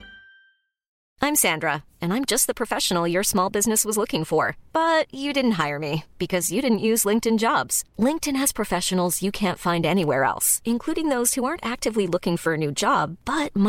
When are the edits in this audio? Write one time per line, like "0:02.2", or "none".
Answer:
0:01.1